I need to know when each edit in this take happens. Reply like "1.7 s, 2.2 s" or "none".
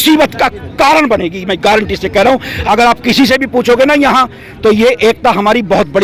none